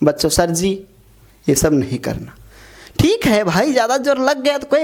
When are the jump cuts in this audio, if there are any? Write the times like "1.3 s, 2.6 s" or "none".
none